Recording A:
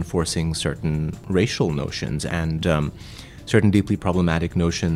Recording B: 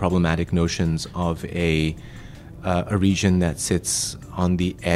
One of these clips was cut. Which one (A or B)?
A